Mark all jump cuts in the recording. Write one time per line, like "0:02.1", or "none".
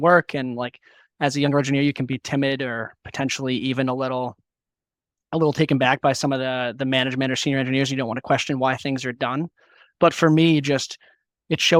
none

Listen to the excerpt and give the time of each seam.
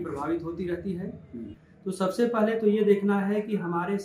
0:01.6

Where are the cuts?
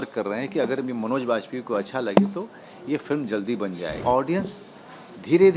0:04.0

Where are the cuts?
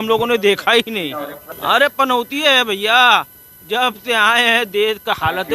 0:01.4

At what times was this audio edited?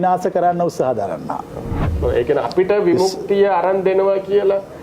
0:01.8

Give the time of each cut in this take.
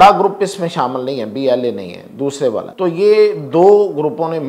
0:02.7

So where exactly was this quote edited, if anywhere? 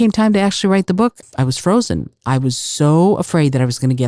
0:01.2

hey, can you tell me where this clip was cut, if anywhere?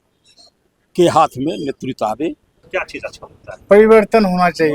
0:02.5

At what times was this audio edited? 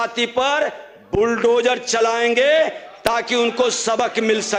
none

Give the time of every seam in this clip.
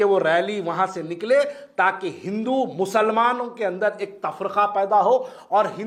none

